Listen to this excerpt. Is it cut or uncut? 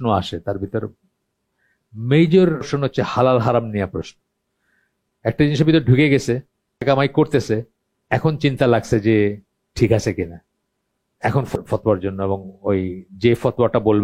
cut